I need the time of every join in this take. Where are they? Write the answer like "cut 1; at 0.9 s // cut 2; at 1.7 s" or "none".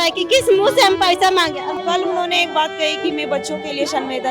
cut 1; at 1.7 s